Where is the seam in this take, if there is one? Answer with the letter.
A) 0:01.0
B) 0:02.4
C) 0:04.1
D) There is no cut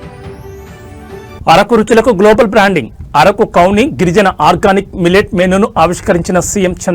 A